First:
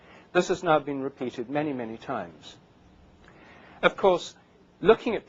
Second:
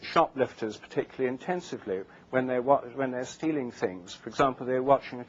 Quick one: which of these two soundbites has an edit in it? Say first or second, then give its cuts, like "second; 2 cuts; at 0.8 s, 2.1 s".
second; 1 cut; at 1.4 s